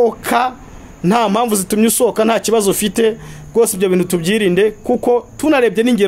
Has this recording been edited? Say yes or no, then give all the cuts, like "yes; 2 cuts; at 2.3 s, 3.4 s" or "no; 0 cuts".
no; 0 cuts